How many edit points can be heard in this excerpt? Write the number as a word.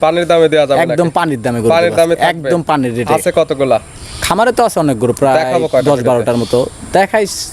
zero